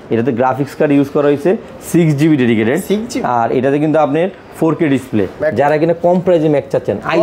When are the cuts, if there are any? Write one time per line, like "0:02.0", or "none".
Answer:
0:05.4